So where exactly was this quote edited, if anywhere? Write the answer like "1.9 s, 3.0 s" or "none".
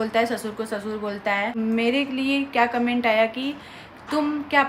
1.5 s